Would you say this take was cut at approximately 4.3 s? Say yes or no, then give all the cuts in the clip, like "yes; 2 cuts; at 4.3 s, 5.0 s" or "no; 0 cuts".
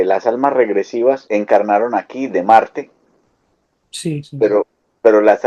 no; 1 cut; at 1.2 s